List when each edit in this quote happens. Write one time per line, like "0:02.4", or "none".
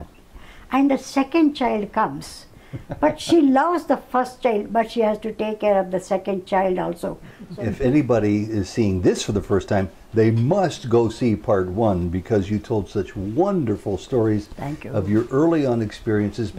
0:07.4

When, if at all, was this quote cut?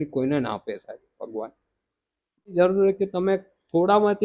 0:02.5

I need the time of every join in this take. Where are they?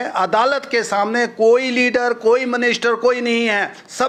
none

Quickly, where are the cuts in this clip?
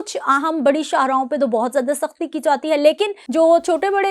0:03.2

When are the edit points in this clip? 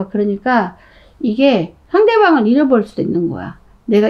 0:01.8

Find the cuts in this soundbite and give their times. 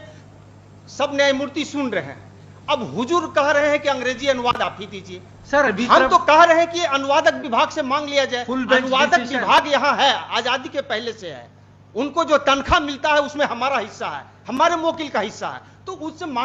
none

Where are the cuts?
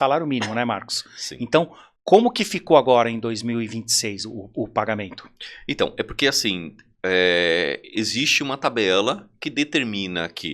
none

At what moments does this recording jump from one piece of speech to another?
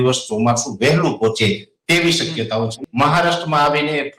0:02.8

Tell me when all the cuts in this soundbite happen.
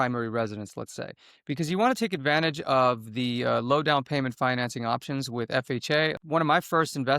0:06.2

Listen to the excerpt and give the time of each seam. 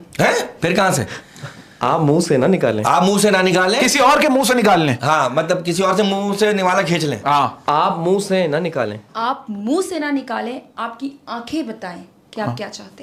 none

